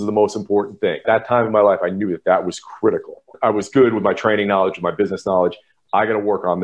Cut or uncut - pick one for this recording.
cut